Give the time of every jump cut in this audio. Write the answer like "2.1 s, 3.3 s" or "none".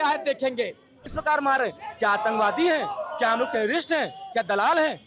1.1 s